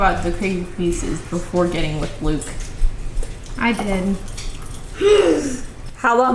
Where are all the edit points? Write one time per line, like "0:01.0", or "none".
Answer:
none

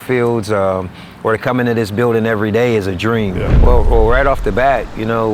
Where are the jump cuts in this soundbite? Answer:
0:03.5

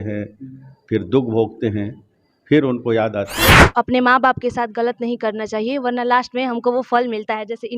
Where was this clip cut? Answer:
0:03.7

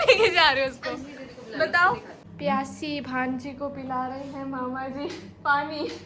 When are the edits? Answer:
0:02.2

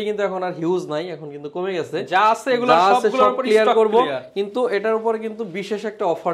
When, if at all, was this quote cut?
none

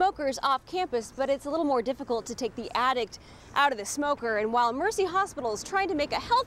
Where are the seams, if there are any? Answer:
none

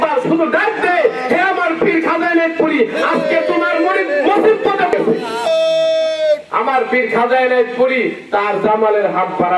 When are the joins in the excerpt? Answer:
0:04.9

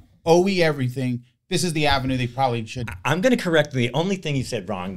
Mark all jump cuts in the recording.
none

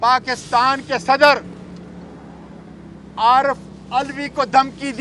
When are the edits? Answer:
none

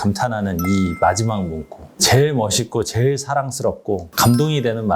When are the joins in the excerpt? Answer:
0:01.8

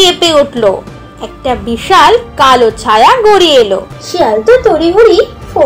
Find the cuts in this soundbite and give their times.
0:04.0

